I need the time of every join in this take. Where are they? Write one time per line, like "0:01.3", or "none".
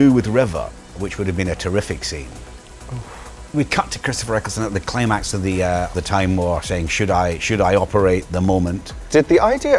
0:01.0
0:02.8
0:05.9
0:08.8